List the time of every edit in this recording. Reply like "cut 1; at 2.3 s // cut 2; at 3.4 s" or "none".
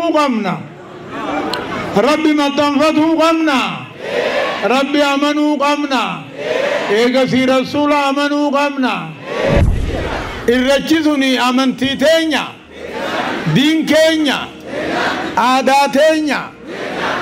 cut 1; at 9.7 s